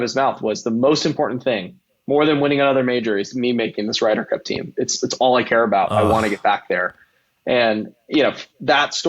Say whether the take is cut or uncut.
uncut